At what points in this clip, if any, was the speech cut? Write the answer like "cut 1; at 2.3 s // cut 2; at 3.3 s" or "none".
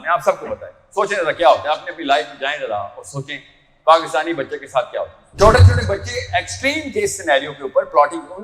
cut 1; at 5.2 s